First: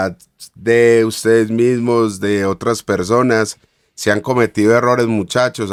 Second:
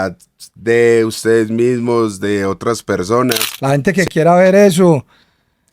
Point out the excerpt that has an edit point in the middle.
second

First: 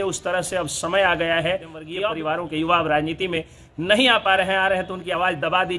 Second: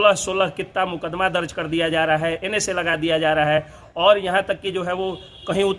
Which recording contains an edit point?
first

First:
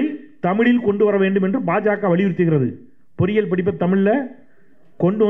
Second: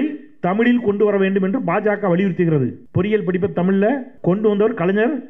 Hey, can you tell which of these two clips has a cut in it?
second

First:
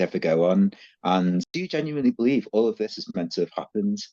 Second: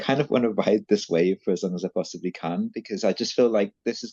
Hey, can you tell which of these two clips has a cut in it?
first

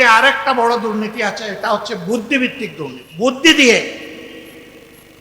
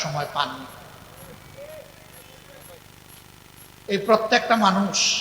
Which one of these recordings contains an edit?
first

